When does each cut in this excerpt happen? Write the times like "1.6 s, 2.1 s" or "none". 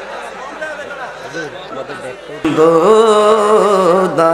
2.3 s